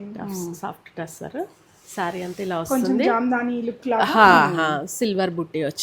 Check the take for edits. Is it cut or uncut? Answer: uncut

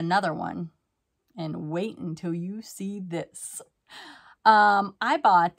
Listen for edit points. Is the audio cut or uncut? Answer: uncut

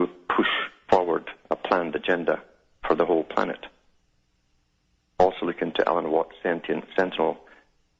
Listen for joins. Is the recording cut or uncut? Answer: uncut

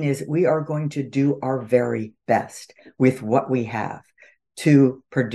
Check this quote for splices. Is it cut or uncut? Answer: uncut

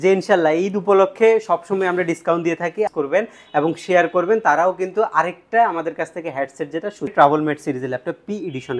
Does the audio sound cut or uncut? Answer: cut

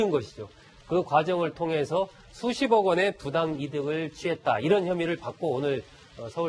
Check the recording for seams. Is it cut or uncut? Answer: cut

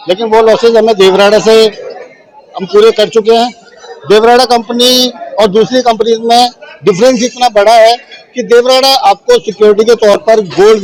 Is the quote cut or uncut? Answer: uncut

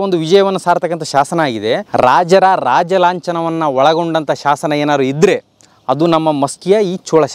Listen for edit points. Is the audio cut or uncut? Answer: cut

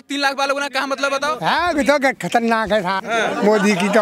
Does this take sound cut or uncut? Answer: cut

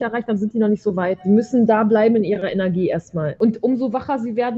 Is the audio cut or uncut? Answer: cut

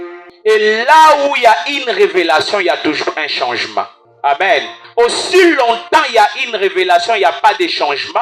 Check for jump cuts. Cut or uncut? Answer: uncut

